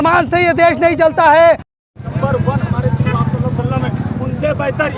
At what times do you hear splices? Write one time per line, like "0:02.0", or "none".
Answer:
0:01.7